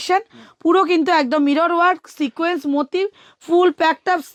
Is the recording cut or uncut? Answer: uncut